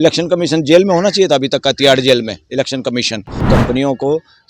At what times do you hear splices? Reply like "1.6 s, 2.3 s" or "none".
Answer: 3.4 s